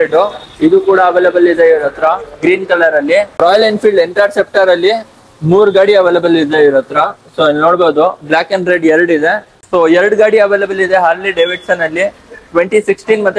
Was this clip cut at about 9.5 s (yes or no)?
yes